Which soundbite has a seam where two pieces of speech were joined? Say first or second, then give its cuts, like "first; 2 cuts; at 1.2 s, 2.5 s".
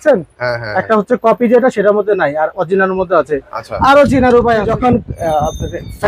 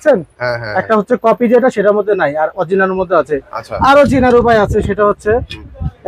first; 1 cut; at 4.7 s